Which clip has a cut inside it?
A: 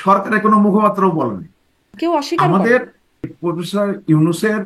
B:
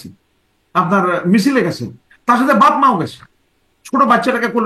A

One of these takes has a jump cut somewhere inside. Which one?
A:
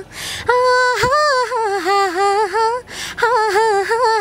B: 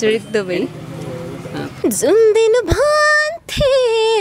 B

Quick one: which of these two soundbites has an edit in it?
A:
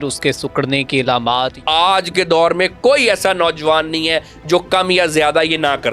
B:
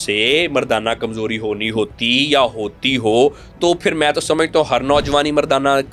A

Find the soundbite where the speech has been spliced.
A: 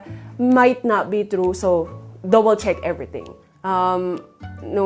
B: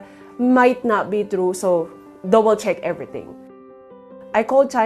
B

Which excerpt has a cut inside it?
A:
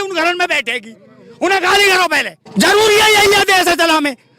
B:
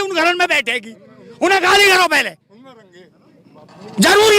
A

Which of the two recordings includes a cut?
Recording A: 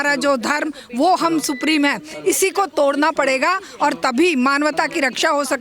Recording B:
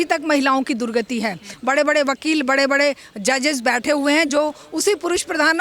B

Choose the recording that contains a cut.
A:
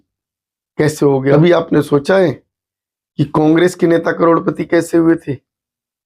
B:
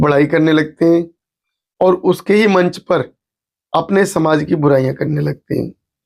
A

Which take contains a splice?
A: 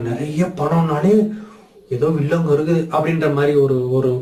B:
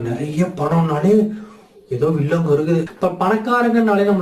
B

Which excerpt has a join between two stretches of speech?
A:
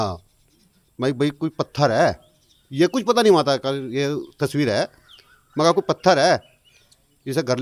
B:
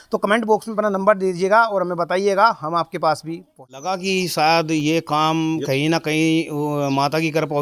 B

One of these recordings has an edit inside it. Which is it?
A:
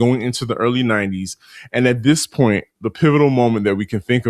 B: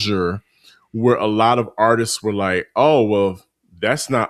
A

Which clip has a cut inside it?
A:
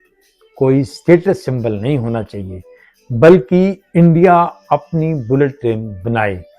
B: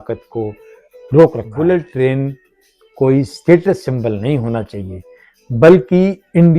B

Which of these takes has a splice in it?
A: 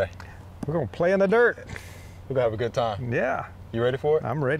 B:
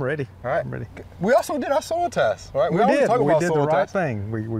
B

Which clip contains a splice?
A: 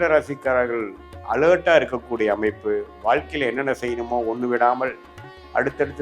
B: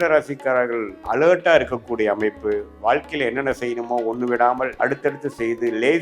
B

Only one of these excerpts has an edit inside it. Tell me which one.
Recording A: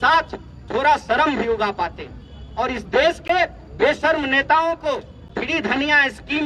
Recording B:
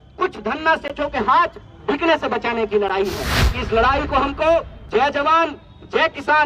B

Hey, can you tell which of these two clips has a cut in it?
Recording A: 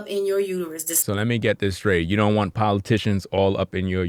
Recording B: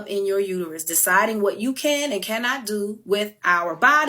B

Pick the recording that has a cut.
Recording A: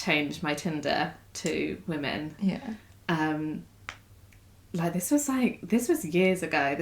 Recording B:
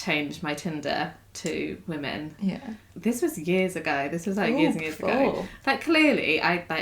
B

